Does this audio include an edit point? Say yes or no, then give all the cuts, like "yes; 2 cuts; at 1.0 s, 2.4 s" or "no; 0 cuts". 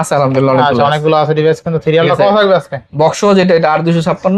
no; 0 cuts